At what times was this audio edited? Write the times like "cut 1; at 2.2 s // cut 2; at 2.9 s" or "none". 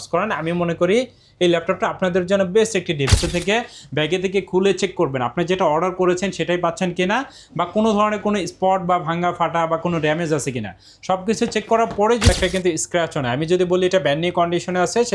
cut 1; at 3.1 s // cut 2; at 12.3 s